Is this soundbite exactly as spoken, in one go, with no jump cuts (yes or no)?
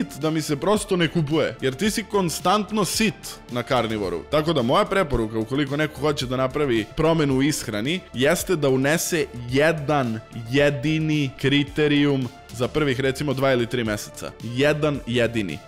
no